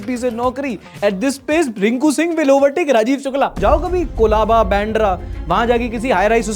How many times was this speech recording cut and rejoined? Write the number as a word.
one